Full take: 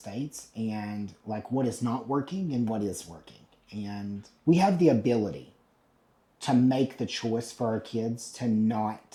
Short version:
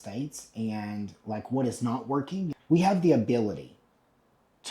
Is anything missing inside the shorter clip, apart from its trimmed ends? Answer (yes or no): yes